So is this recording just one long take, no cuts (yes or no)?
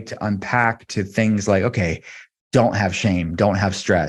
yes